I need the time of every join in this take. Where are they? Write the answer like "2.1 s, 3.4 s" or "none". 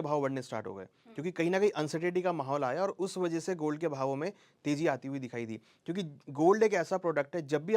none